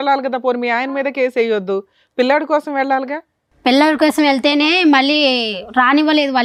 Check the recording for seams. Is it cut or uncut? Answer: uncut